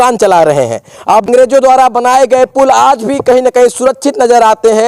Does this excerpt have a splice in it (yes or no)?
yes